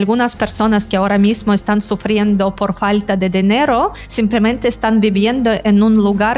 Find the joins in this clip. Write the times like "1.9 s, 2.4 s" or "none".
none